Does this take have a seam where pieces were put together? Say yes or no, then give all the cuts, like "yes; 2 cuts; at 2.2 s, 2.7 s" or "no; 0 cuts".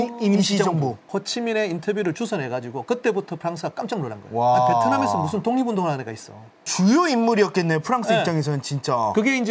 yes; 1 cut; at 1.0 s